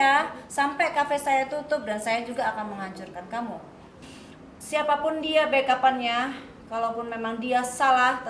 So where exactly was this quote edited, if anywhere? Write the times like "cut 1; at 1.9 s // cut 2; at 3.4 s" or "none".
cut 1; at 3.9 s